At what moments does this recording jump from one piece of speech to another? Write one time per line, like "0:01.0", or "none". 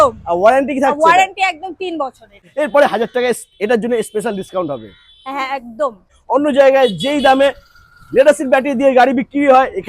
0:02.5
0:06.2